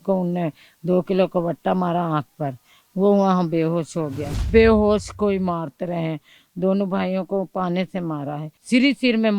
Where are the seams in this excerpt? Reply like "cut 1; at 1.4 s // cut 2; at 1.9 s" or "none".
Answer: cut 1; at 4.5 s // cut 2; at 8.5 s